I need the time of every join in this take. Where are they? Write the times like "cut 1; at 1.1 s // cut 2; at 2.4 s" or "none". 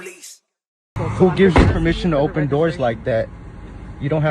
cut 1; at 1.0 s